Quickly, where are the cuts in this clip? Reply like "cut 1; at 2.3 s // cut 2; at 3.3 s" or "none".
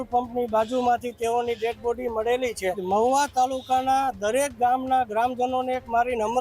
cut 1; at 2.8 s